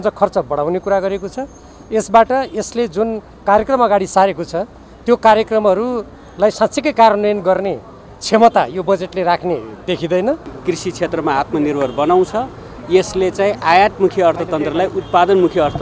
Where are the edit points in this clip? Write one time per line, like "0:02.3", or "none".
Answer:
0:10.5